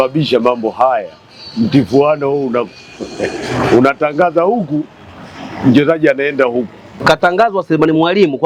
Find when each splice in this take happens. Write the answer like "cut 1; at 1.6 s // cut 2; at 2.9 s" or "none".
cut 1; at 7.0 s